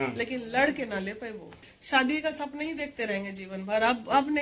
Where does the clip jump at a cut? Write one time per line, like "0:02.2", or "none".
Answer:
0:01.7